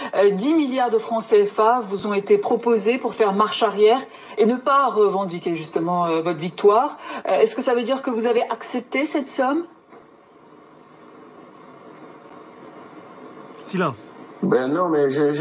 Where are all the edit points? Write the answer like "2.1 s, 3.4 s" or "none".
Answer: none